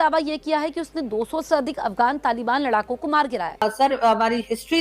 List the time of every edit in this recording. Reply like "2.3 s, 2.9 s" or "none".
3.6 s